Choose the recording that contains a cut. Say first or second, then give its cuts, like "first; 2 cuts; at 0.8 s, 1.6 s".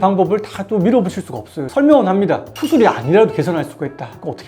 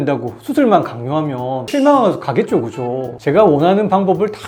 first; 1 cut; at 1.6 s